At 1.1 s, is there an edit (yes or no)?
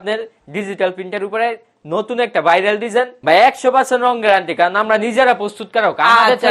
no